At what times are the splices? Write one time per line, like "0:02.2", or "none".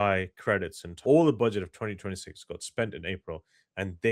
0:01.0